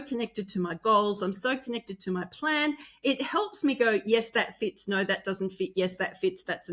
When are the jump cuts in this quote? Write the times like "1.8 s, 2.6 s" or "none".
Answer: none